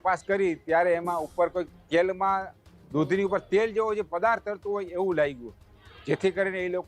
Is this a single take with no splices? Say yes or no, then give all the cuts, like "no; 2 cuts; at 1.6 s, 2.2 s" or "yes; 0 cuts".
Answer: yes; 0 cuts